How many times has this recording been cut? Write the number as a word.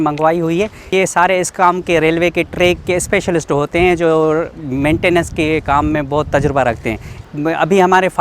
two